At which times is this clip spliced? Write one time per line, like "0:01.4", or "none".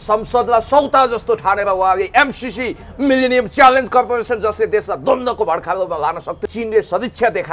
0:06.4

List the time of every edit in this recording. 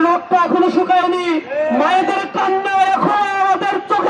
none

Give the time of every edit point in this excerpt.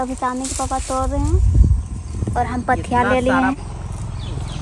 0:03.5

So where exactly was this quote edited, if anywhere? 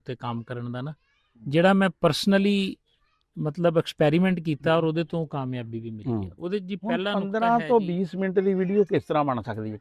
0:07.1

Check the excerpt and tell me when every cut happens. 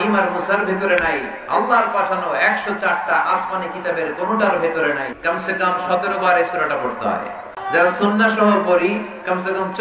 0:05.1
0:07.6

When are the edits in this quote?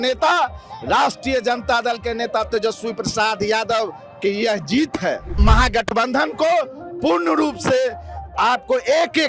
0:05.4

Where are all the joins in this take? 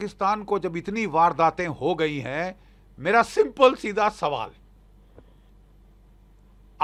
none

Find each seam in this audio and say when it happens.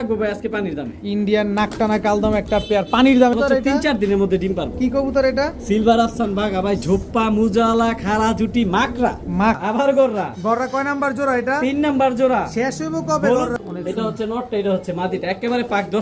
0:03.3
0:09.6
0:13.6

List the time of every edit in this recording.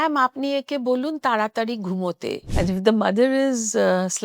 0:02.5

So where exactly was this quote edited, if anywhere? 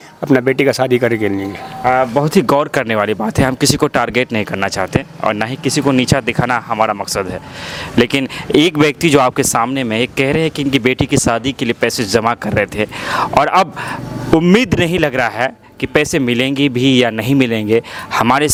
none

